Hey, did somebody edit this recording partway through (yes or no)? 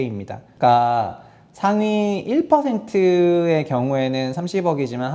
no